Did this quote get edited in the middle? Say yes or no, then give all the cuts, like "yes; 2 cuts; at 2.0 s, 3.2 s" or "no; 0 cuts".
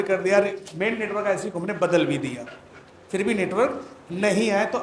no; 0 cuts